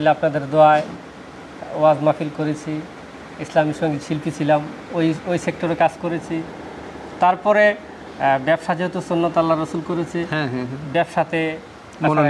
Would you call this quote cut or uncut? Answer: uncut